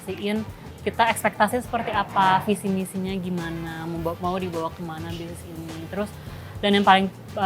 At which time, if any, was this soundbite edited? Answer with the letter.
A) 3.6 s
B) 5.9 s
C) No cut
C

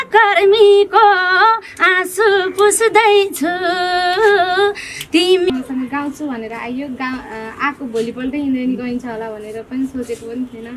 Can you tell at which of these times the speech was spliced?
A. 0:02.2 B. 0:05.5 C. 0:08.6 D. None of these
B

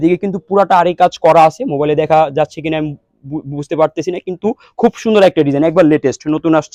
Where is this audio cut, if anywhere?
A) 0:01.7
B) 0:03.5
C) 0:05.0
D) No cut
D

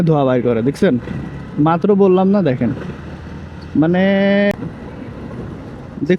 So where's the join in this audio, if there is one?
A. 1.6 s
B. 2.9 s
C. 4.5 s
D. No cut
C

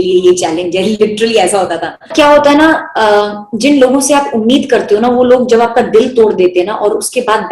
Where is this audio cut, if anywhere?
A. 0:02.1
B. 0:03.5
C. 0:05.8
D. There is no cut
A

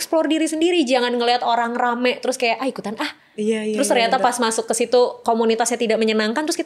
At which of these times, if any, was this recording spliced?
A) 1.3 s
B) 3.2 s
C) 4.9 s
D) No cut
D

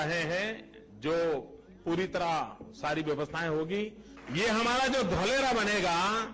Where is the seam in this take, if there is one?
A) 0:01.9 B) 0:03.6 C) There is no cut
C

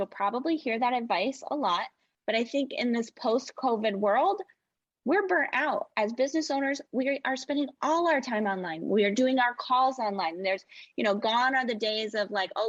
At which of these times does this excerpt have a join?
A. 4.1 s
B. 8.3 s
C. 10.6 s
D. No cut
D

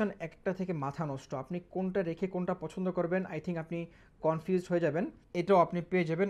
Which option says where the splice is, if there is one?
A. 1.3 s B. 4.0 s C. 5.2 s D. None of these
C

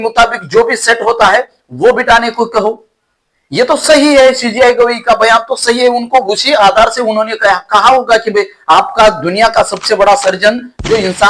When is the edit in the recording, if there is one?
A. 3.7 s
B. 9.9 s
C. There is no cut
A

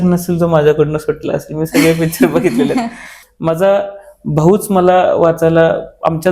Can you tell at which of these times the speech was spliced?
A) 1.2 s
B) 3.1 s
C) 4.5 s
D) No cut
B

